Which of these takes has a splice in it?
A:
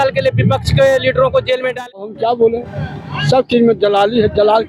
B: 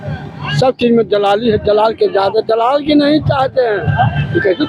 A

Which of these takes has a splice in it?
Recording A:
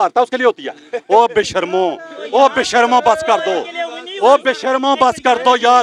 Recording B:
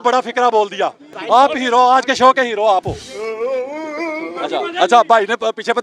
B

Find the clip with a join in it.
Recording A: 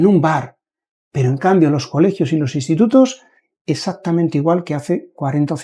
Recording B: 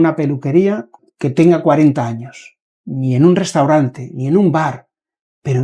B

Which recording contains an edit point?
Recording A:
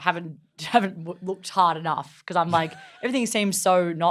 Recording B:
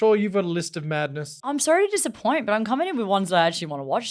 B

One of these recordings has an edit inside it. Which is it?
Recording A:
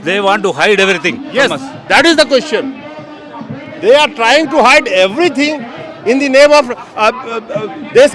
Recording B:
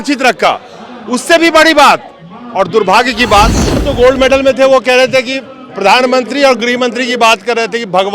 B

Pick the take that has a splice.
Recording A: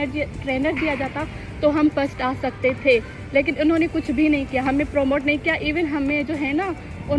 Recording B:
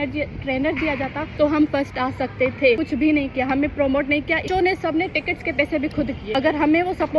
B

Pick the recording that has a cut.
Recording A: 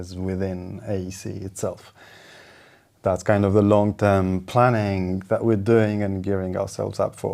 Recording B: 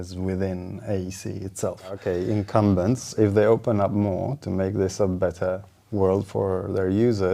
B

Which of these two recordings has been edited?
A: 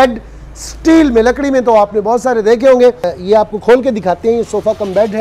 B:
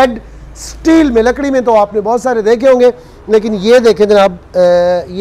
A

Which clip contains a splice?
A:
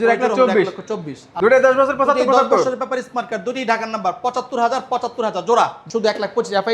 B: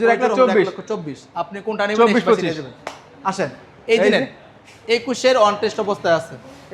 A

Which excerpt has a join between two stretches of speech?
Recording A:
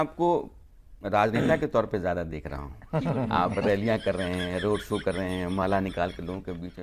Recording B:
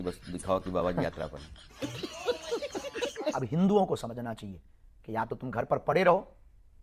B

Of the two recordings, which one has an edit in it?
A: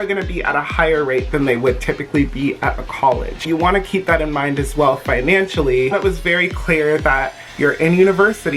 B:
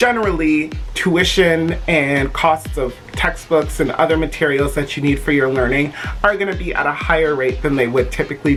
A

